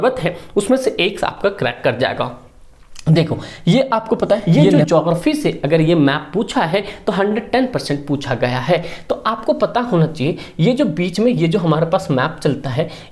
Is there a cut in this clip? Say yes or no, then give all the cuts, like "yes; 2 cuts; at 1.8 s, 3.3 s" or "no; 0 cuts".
yes; 1 cut; at 4.4 s